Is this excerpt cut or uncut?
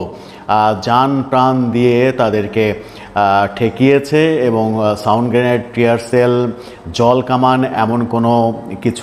uncut